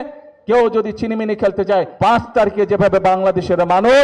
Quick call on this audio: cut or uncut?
cut